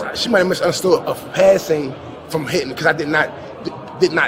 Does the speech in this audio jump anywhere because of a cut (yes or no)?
no